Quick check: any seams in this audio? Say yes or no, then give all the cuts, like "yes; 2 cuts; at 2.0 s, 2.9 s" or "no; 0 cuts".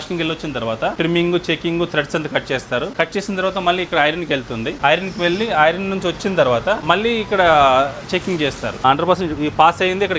yes; 5 cuts; at 1.0 s, 2.9 s, 4.8 s, 6.8 s, 8.8 s